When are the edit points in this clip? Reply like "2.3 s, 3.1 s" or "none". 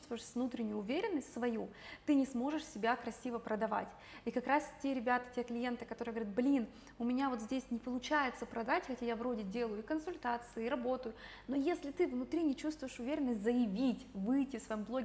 none